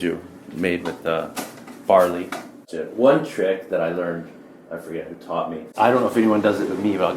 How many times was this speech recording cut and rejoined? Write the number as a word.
two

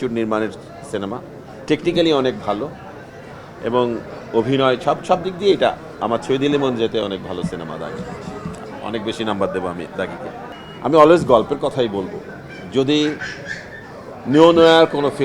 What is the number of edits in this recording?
zero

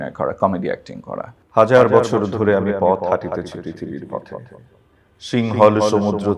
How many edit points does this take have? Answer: one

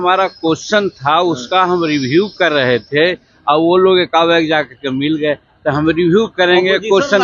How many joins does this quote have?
zero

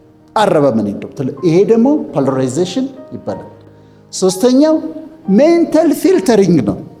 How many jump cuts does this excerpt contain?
zero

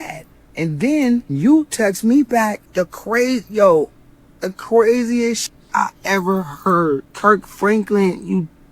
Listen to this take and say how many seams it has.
three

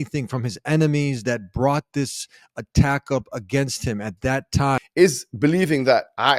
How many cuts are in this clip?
one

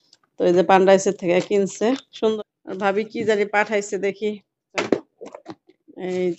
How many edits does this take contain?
two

